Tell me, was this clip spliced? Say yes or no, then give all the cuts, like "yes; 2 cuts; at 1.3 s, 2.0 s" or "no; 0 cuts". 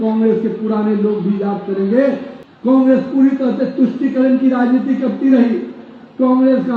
yes; 1 cut; at 2.3 s